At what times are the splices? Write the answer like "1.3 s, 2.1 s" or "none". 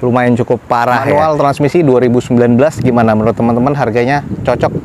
1.1 s